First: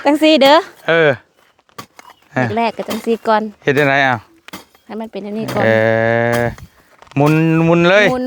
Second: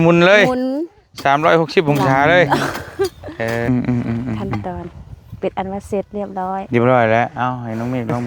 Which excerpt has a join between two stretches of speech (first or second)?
second